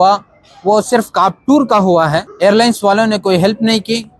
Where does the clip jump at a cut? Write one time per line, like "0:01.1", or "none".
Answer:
0:02.3